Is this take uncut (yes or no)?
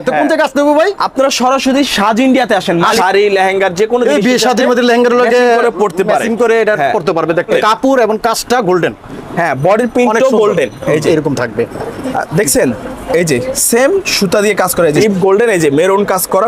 no